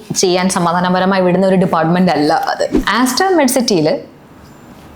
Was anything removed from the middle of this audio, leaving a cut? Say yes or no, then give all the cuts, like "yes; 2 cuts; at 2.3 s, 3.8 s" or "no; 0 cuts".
yes; 1 cut; at 2.8 s